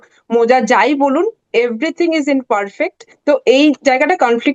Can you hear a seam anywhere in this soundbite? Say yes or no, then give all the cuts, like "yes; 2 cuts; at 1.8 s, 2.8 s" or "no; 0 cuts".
yes; 1 cut; at 3.1 s